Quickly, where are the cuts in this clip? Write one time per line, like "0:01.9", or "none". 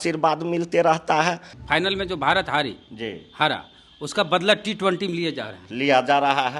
0:01.5

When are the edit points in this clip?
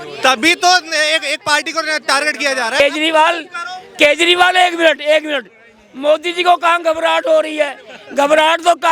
0:02.8

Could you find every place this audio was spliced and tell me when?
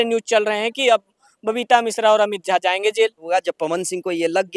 0:03.2

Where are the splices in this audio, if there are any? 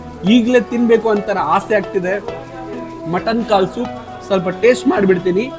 none

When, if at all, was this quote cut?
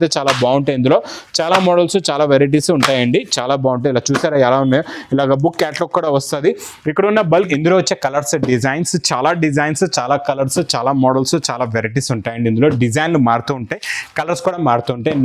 0:07.5

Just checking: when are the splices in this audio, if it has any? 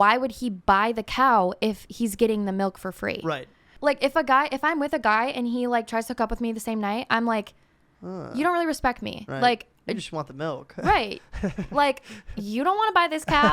0:03.7

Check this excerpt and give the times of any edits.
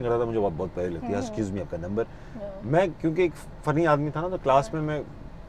none

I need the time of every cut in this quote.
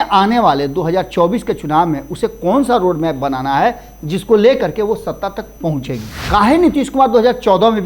0:06.1

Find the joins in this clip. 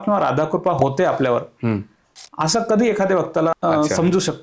0:03.5

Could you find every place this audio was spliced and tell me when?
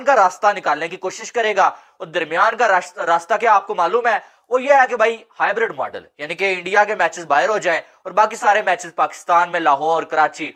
none

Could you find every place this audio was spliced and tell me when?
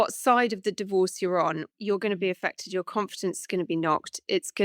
0:01.7

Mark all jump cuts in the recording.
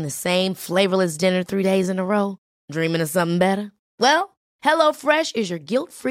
none

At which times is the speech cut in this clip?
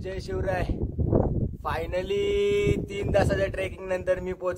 none

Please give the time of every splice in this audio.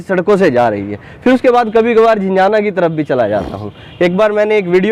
none

